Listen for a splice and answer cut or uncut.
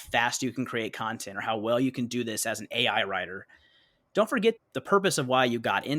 cut